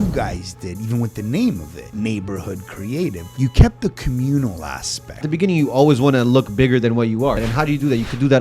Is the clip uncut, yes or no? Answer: no